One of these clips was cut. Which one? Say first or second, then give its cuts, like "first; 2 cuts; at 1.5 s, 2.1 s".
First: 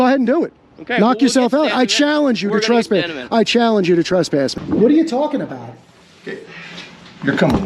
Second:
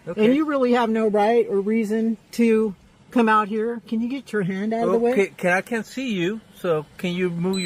first; 1 cut; at 4.6 s